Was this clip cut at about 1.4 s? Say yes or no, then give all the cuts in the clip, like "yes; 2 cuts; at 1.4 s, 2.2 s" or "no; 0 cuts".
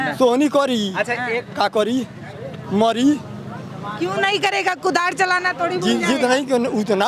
no; 0 cuts